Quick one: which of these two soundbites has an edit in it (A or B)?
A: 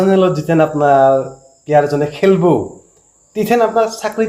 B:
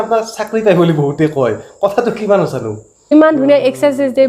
B